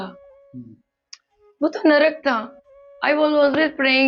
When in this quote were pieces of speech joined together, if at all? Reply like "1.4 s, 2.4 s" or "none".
none